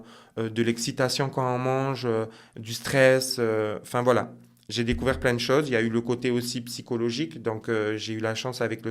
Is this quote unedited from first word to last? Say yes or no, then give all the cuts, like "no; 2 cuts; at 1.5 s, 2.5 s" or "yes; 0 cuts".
yes; 0 cuts